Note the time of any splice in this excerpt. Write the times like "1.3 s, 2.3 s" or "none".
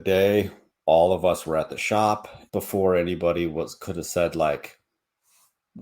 2.3 s